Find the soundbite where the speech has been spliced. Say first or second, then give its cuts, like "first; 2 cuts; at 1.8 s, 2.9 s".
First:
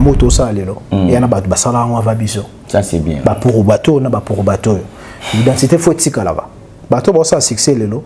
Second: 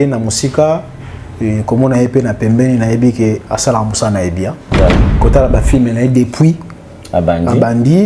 second; 1 cut; at 4.9 s